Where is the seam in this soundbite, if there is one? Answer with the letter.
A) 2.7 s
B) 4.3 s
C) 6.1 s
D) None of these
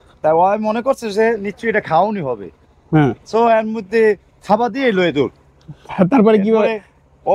D